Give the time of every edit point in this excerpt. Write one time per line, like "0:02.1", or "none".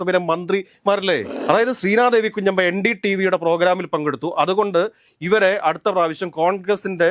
0:01.3